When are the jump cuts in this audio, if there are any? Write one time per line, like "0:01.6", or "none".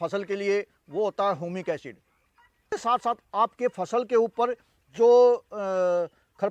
0:02.7